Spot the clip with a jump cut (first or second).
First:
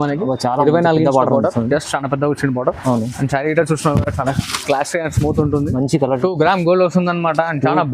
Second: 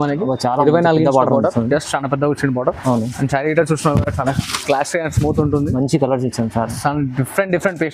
first